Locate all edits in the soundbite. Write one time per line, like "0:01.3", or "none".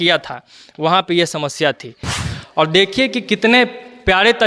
0:02.1